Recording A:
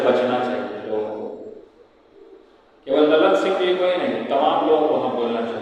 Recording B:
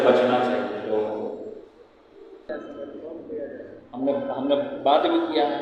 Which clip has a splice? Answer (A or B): B